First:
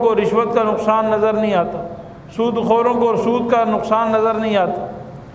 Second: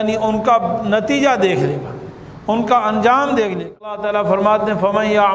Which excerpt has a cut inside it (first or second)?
second